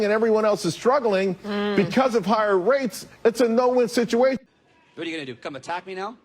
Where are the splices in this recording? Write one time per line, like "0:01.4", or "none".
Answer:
0:04.5